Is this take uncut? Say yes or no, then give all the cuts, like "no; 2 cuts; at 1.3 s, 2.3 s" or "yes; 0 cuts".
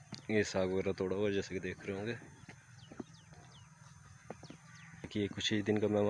no; 1 cut; at 5.1 s